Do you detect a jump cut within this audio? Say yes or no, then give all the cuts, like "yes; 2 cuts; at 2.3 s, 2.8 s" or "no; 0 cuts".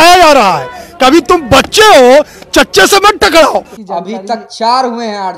yes; 1 cut; at 3.8 s